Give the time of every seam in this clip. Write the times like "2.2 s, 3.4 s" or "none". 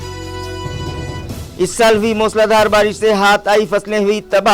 1.1 s